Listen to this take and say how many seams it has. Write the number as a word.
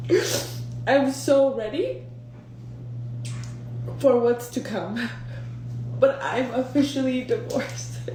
zero